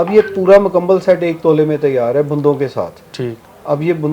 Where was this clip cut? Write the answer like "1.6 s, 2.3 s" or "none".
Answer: none